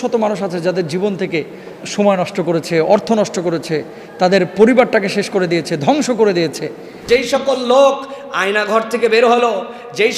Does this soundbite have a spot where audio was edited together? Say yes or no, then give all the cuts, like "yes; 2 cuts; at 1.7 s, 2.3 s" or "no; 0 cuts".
yes; 1 cut; at 7.0 s